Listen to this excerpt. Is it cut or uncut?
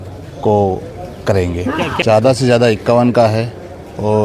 cut